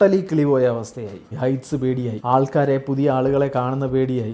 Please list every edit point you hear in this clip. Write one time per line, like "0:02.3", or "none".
0:01.3